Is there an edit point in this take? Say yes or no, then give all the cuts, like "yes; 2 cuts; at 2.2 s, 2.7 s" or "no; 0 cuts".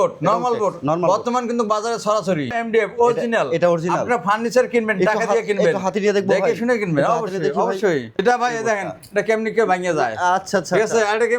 yes; 2 cuts; at 2.5 s, 8.2 s